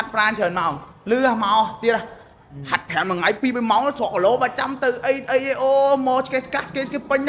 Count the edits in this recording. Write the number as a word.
zero